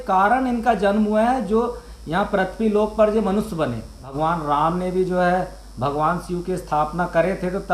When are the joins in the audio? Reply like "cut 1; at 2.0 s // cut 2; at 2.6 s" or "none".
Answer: cut 1; at 4.1 s